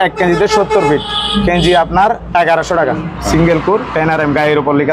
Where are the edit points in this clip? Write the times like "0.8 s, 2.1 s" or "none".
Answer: 3.1 s